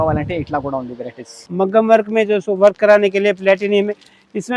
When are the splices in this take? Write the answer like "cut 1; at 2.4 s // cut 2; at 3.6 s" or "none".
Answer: cut 1; at 1.4 s

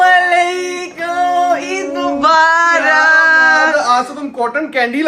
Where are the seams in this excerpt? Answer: none

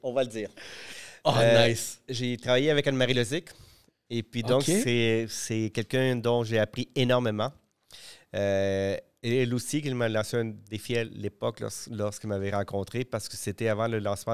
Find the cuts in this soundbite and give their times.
none

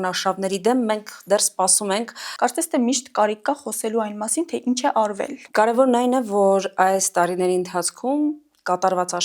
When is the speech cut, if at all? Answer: cut 1; at 2.3 s // cut 2; at 5.4 s

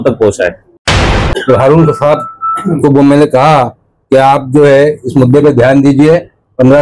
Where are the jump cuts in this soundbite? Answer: cut 1; at 1.0 s

